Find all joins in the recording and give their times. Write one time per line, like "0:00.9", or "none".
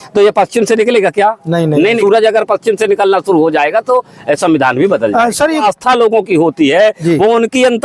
0:02.0
0:05.6